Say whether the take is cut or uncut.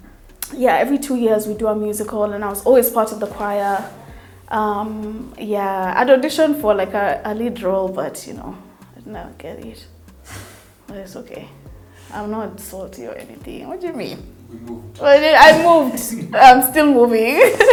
uncut